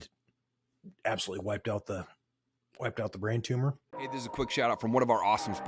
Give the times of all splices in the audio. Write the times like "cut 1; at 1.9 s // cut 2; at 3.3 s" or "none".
cut 1; at 3.9 s